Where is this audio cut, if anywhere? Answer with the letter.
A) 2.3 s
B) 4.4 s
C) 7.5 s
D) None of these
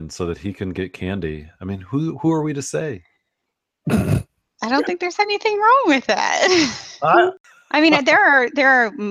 C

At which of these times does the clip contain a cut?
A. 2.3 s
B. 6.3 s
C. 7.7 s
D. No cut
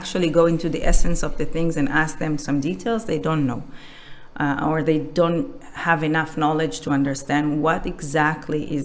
D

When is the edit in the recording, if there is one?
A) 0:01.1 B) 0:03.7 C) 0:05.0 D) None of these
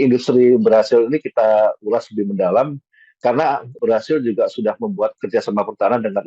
B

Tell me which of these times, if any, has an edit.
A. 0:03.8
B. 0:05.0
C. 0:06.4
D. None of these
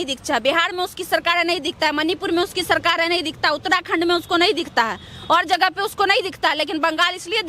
D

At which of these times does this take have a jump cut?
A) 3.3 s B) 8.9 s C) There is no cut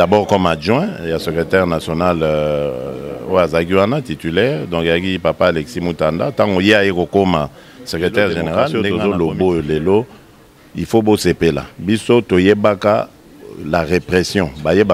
B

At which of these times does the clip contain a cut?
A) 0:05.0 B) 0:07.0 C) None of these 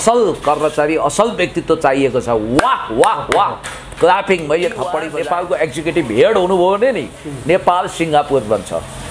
A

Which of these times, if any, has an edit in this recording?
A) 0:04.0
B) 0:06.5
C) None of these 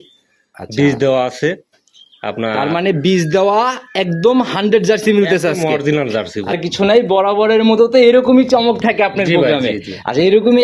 B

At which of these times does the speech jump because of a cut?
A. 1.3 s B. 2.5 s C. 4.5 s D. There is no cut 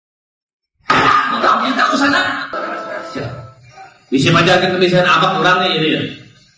B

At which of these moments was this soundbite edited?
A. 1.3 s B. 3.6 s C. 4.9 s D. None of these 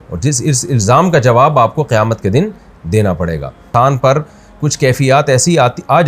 B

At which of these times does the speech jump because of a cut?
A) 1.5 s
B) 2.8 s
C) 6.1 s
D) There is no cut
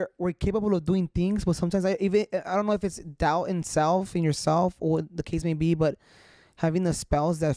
D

